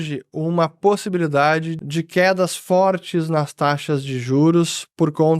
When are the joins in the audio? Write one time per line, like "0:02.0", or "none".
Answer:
0:01.8